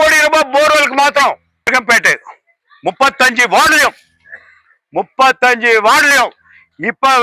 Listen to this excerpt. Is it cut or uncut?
cut